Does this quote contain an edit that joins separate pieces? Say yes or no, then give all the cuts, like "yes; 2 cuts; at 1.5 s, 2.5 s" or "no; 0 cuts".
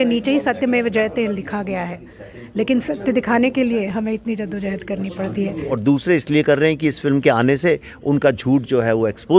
yes; 1 cut; at 5.7 s